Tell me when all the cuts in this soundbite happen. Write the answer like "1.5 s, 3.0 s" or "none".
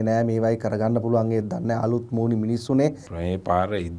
3.1 s

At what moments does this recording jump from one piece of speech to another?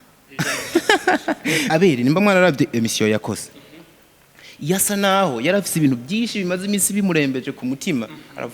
1.7 s

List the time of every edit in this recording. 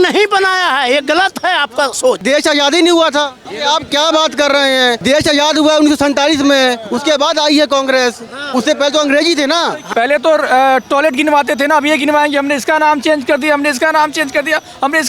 2.2 s, 3.4 s, 5.0 s, 9.8 s

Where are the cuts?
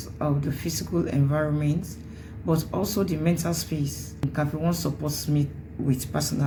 none

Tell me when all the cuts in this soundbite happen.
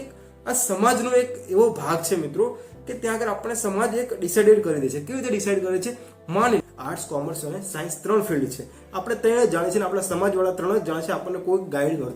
6.6 s

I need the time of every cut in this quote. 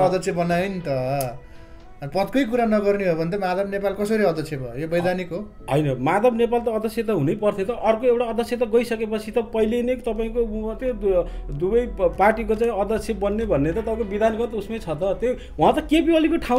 none

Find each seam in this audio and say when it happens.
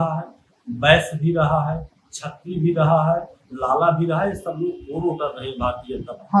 none

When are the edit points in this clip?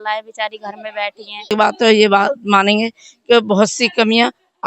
1.5 s

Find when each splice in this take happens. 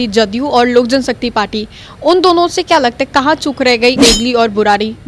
4.0 s

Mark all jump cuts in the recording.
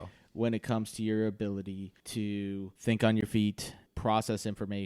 1.9 s, 2.7 s, 3.9 s

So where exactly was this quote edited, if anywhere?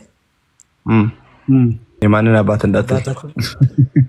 1.9 s

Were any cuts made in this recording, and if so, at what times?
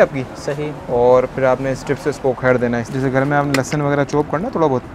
2.9 s

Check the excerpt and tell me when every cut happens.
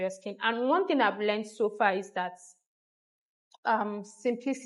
none

